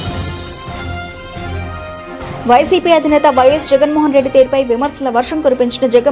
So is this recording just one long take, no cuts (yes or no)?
no